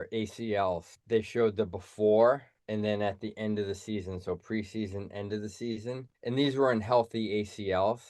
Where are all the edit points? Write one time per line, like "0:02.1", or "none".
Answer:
0:00.9
0:02.5
0:06.1